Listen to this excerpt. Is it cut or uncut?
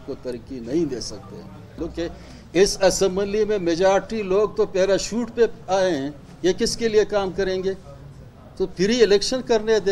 cut